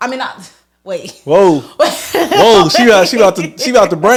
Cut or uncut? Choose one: uncut